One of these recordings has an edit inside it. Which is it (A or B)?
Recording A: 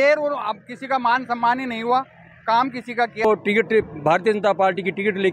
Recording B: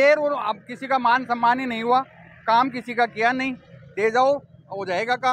A